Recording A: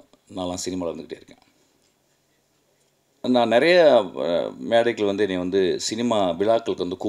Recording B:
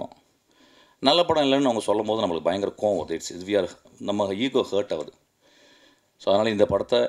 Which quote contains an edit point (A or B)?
A